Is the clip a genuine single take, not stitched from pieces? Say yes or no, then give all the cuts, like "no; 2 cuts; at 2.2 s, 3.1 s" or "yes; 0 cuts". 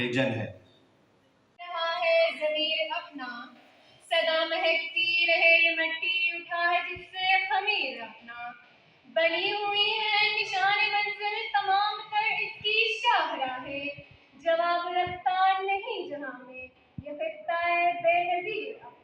no; 1 cut; at 1.6 s